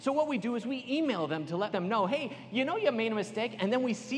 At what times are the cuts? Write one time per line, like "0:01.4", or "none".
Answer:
0:01.7